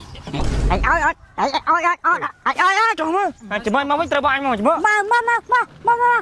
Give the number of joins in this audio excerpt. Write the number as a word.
one